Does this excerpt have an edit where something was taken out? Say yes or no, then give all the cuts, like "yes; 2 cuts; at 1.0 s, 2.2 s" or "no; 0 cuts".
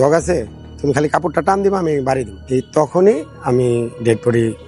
no; 0 cuts